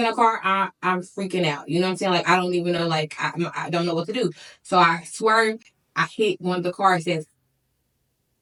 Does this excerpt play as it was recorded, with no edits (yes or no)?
yes